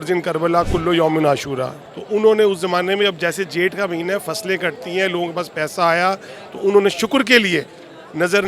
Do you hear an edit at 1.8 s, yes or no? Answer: yes